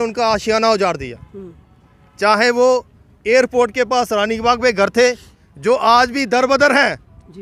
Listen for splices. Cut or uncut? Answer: uncut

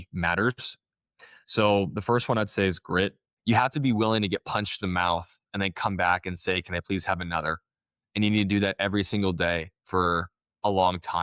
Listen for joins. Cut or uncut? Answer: cut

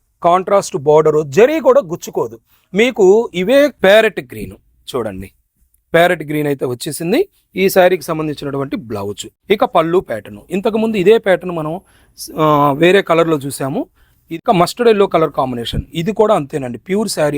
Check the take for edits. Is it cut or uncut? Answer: cut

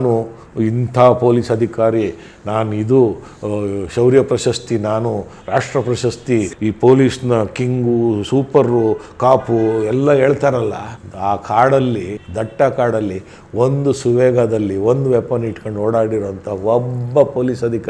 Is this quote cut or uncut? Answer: cut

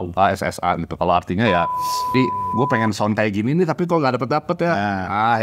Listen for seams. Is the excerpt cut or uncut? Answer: cut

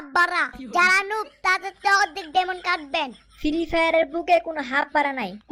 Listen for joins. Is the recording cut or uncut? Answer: uncut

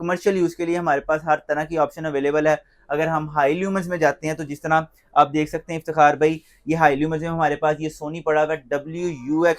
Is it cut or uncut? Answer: uncut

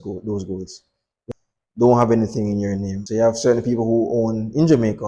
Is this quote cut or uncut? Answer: cut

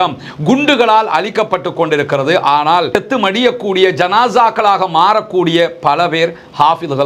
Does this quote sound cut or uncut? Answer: uncut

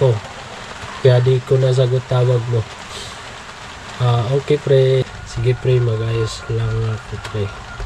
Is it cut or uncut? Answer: cut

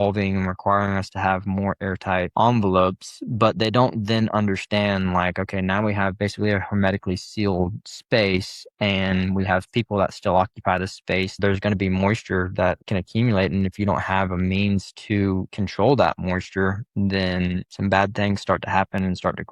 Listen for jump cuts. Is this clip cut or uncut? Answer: cut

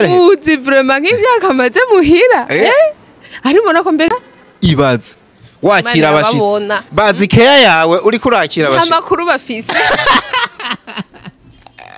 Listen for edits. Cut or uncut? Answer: cut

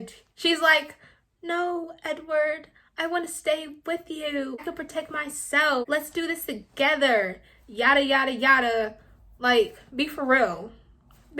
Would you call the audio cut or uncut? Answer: cut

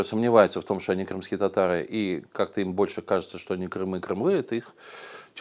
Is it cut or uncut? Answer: uncut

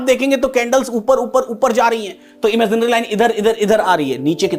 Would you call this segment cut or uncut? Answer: uncut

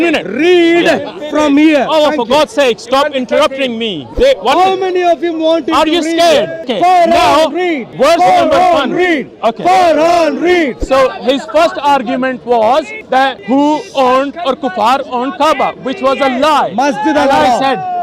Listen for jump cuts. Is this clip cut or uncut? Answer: cut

